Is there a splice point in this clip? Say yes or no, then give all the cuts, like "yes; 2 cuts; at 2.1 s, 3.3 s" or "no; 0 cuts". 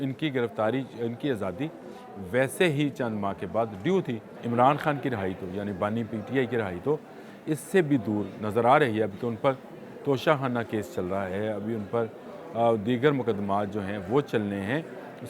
yes; 1 cut; at 4.3 s